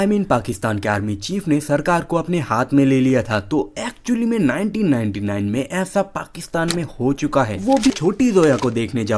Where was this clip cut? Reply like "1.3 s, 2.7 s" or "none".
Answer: 7.9 s